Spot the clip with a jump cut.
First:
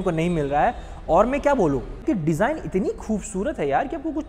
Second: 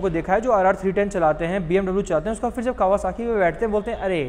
first; 1 cut; at 2.0 s

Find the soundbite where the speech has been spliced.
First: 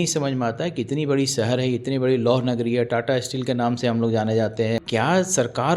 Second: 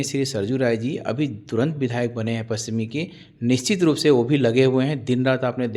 first; 1 cut; at 4.8 s

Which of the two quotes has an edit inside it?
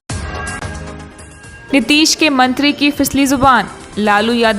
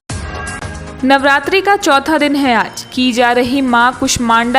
second; 1 cut; at 0.9 s

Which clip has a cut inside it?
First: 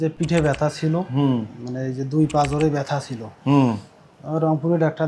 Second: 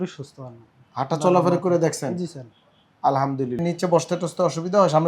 second; 1 cut; at 3.6 s

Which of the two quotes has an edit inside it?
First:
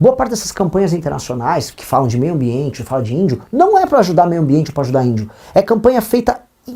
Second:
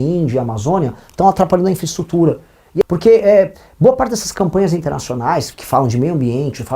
second; 1 cut; at 2.8 s

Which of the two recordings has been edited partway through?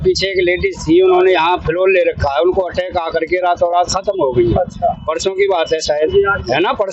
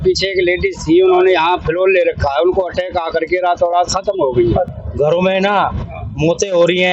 second; 1 cut; at 4.7 s

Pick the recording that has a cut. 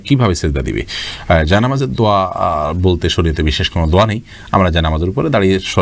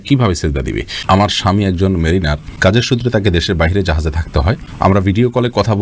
second; 3 cuts; at 0.9 s, 2.4 s, 4.7 s

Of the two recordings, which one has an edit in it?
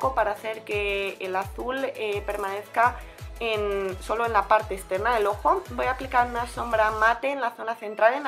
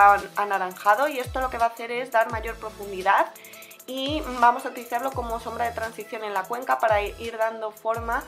second; 1 cut; at 4.3 s

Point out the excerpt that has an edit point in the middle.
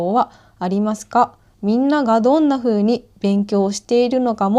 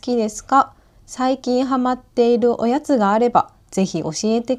first; 1 cut; at 1.5 s

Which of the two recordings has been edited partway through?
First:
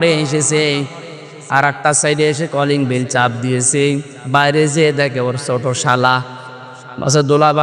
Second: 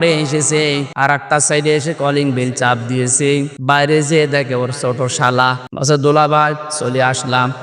second; 3 cuts; at 1.2 s, 3.5 s, 5.7 s

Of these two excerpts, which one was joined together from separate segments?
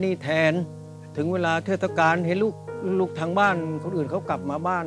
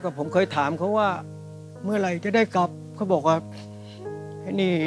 first; 1 cut; at 1.0 s

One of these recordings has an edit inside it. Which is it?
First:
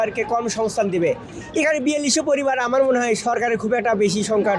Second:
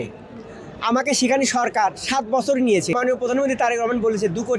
second; 1 cut; at 2.9 s

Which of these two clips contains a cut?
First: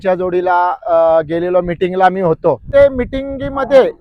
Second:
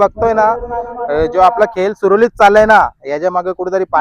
first; 1 cut; at 2.6 s

